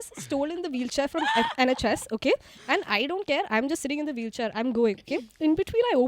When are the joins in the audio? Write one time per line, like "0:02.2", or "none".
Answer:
none